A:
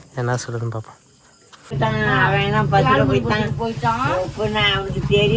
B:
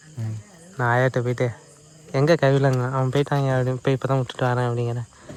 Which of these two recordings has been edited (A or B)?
A